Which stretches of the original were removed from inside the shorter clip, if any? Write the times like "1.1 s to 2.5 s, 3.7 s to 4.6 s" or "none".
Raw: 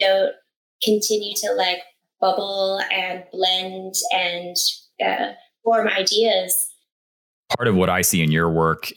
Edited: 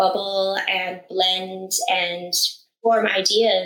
4.8 s to 5.4 s